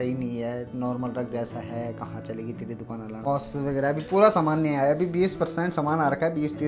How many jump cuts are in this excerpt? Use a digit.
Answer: 1